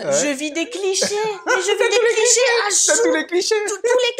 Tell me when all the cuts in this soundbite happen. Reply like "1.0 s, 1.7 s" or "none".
none